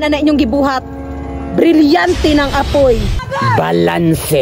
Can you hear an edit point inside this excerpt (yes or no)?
yes